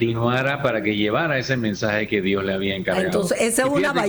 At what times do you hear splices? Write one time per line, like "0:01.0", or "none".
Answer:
none